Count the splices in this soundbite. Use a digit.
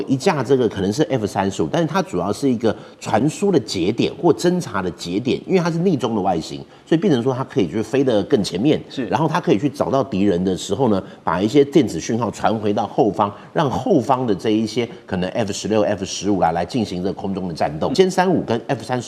1